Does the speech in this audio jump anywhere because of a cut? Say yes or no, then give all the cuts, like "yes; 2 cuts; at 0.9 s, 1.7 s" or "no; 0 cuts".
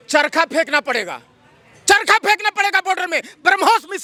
no; 0 cuts